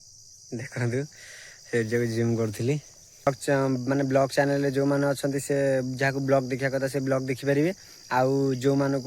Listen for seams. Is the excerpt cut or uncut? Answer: cut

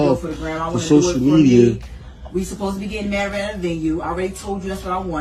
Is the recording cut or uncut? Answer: uncut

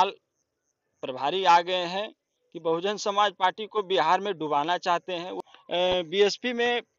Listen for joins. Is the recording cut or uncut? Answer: cut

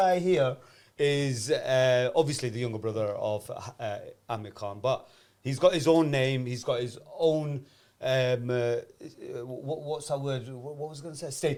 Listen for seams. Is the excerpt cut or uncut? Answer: uncut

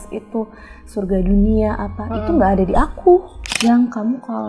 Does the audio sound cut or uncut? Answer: cut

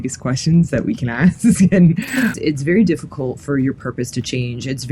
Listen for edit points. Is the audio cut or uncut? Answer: cut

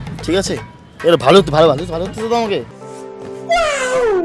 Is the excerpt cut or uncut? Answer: uncut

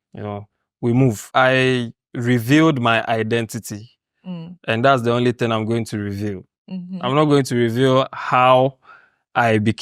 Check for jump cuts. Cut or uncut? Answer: cut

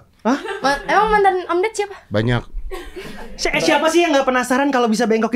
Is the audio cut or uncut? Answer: cut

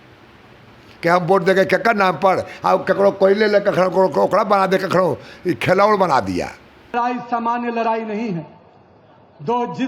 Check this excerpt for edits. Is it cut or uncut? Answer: cut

